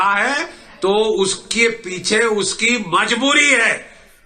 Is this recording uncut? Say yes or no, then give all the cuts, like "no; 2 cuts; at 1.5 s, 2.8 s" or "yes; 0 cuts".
yes; 0 cuts